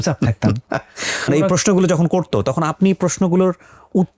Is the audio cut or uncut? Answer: uncut